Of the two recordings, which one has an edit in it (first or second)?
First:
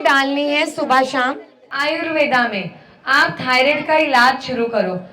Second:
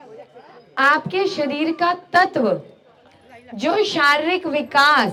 first